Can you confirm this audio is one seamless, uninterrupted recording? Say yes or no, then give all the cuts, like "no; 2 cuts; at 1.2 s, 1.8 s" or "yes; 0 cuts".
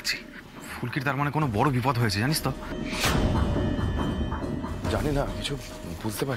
yes; 0 cuts